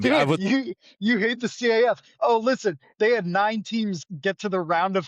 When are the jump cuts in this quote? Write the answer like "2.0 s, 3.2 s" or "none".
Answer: 4.0 s